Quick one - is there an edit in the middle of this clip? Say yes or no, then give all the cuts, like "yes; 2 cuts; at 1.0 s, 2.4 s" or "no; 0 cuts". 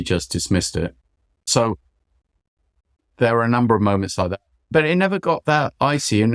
no; 0 cuts